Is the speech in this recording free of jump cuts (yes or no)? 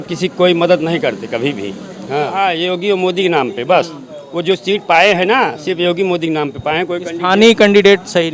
no